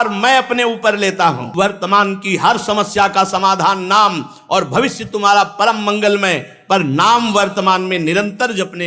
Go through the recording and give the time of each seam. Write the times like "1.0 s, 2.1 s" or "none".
1.4 s